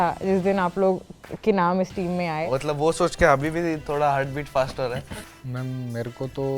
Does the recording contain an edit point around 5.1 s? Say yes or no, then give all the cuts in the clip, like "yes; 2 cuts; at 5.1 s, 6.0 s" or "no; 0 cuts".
yes; 2 cuts; at 2.4 s, 5.1 s